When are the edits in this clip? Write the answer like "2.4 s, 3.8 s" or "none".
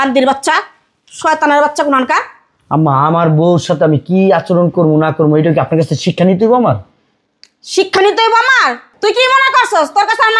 none